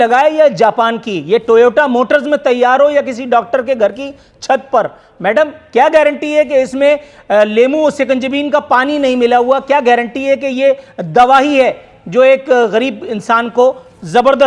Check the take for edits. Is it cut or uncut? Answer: uncut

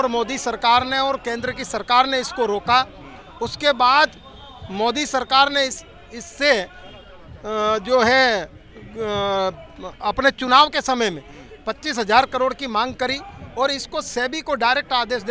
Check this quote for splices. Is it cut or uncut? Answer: uncut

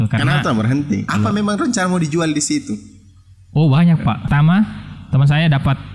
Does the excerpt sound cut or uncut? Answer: cut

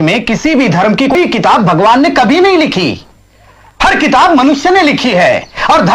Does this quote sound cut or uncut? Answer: cut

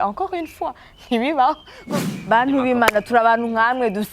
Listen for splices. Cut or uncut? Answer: cut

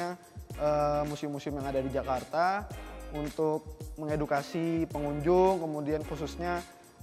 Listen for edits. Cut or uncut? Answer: uncut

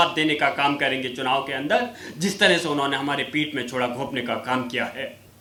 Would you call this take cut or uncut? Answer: uncut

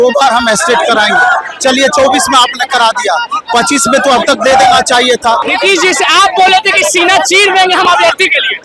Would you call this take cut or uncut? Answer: cut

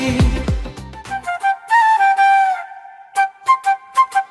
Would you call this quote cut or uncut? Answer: cut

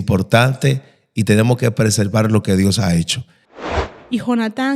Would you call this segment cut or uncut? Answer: cut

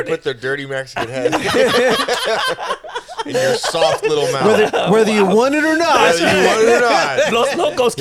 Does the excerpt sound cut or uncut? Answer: uncut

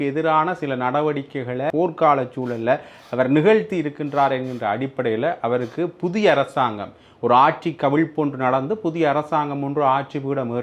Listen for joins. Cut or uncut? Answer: cut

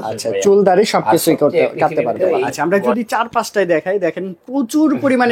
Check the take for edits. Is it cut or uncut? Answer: cut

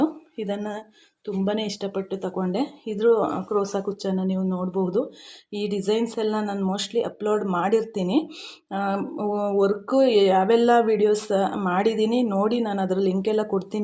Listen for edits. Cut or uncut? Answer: uncut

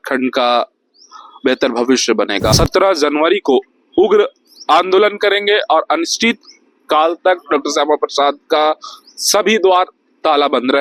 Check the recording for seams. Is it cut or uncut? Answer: cut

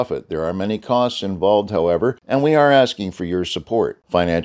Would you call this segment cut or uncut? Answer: cut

